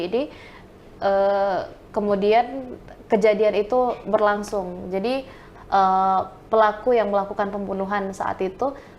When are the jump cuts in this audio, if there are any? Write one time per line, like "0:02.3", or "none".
0:05.5

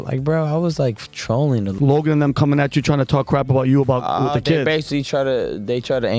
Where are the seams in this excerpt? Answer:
0:01.7

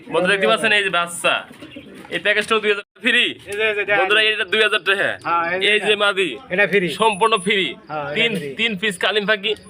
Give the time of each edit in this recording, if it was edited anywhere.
0:03.0

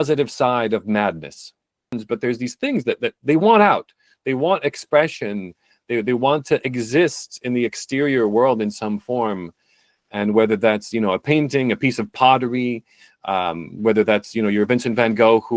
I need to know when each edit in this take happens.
0:01.9

